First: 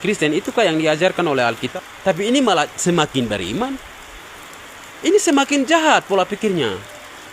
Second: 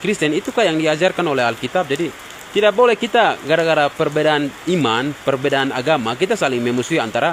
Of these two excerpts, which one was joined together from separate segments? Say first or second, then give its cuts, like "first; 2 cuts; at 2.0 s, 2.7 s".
first; 1 cut; at 1.7 s